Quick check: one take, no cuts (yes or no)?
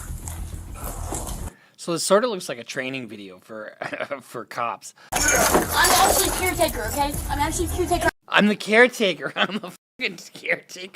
no